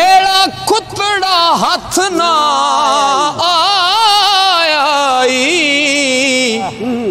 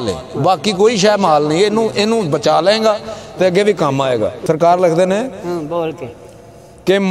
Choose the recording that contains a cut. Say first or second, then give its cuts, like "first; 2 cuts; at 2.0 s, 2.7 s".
second; 1 cut; at 4.4 s